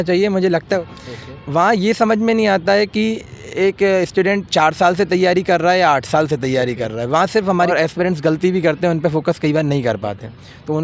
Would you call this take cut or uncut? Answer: cut